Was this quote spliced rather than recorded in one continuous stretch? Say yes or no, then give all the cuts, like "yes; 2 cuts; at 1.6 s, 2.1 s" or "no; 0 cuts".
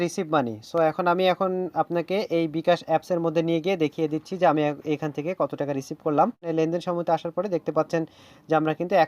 yes; 1 cut; at 6.4 s